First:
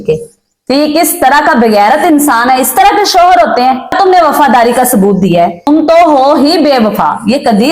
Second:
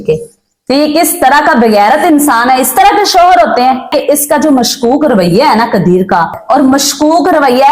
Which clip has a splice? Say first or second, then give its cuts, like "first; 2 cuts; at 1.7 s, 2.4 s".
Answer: second; 2 cuts; at 3.9 s, 6.4 s